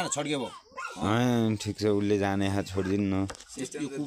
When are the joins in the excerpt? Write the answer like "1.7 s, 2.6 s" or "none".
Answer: 1.2 s

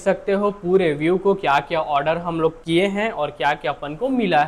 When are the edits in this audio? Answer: none

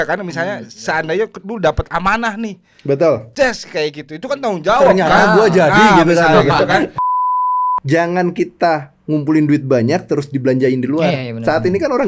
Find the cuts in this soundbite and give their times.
7.3 s

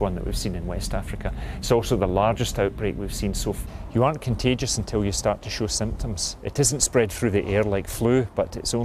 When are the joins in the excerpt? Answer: 3.6 s

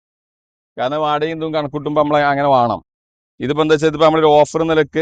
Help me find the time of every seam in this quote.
none

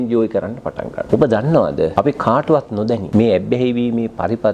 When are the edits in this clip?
1.0 s, 1.9 s, 3.0 s

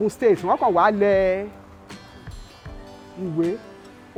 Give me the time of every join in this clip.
none

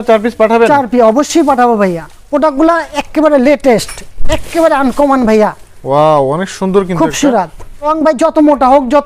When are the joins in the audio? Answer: 2.1 s, 7.9 s

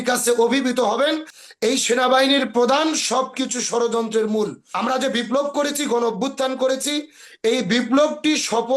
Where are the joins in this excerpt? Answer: 1.3 s, 4.6 s

